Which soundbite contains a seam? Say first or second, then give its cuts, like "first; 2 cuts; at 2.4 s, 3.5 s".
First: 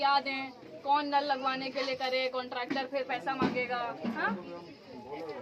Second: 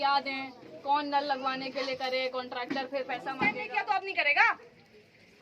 second; 1 cut; at 3.2 s